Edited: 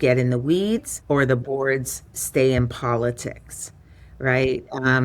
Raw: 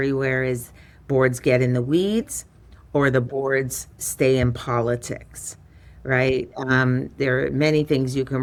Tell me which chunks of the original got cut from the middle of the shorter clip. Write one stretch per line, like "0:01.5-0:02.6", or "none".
0:02.4-0:02.8